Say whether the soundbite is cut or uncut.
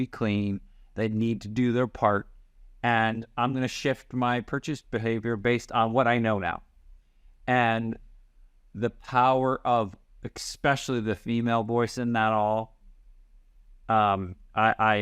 uncut